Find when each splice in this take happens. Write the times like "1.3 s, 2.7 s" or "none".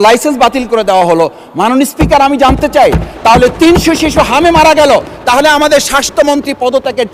none